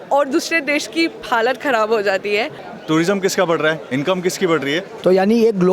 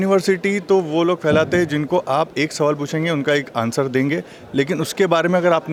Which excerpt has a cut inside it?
first; 2 cuts; at 2.6 s, 4.9 s

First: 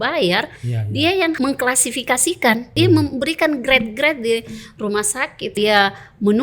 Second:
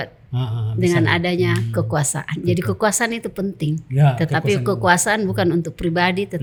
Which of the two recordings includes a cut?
first; 3 cuts; at 1.4 s, 2.7 s, 5.6 s

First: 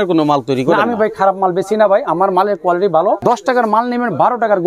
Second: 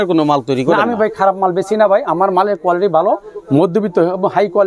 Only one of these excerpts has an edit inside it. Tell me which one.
first; 1 cut; at 3.2 s

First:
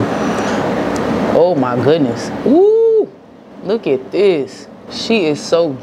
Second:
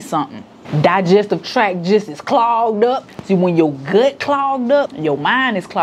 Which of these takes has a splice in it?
second; 2 cuts; at 3.1 s, 4.9 s

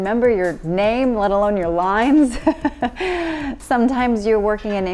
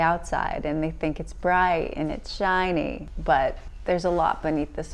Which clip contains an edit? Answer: second; 2 cuts; at 3.1 s, 3.7 s

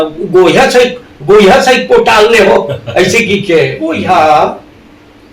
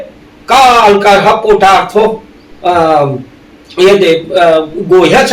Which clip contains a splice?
first; 1 cut; at 4.0 s

